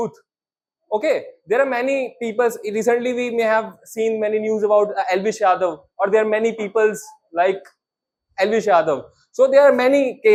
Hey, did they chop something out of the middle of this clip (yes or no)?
no